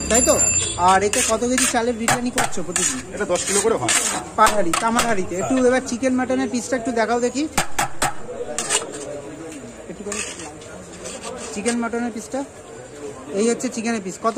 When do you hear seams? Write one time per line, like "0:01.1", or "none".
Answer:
none

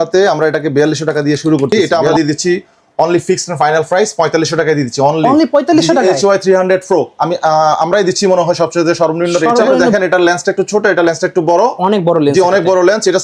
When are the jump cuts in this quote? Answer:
0:01.7
0:09.8

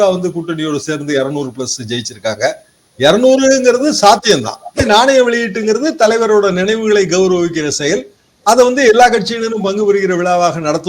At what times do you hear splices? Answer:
0:04.8

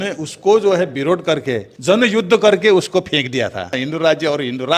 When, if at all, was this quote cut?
0:01.6
0:03.8

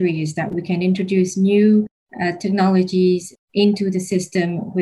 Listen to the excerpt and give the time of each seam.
none

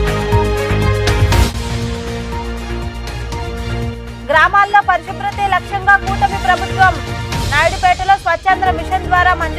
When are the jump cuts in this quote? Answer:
0:01.2

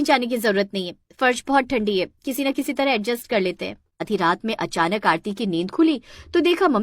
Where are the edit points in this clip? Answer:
0:04.1

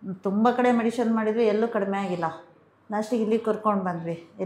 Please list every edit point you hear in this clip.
none

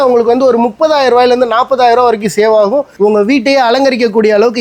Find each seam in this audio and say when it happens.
0:02.9

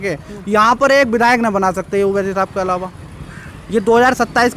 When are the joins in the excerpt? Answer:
none

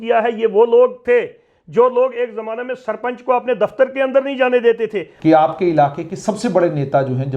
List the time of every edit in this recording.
0:05.0

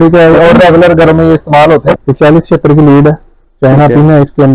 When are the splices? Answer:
0:01.9

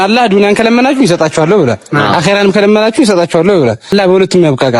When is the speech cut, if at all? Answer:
0:03.9

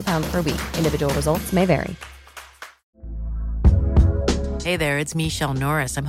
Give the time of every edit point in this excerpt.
0:02.7

